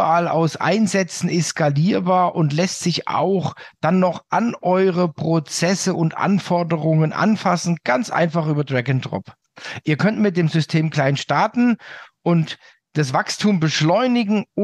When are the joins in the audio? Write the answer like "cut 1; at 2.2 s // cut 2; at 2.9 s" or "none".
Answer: none